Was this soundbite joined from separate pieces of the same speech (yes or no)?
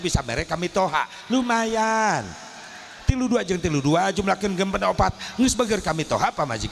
no